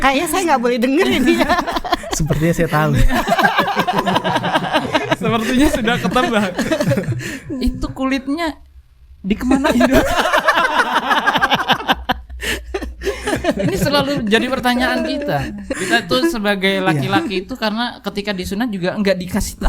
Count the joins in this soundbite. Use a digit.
1